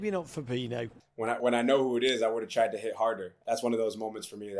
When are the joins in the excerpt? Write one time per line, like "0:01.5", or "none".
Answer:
0:01.0
0:03.3